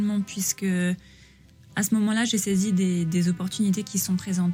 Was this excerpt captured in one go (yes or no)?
yes